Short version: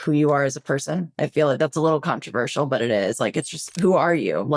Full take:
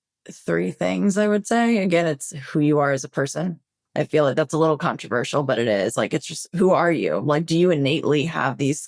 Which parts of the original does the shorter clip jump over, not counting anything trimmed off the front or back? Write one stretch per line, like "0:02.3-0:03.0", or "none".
0:03.6-0:03.8